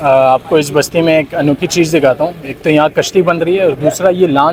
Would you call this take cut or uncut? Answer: uncut